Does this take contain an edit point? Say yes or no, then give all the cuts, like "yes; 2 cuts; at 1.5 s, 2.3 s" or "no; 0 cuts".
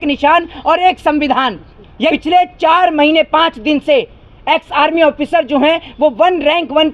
yes; 1 cut; at 2.2 s